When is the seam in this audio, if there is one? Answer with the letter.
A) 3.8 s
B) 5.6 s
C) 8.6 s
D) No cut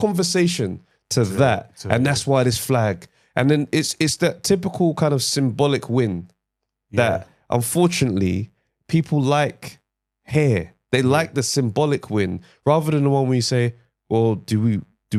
D